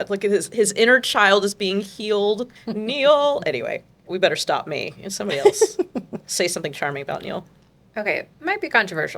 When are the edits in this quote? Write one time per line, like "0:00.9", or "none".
0:02.6
0:03.8
0:06.2
0:08.2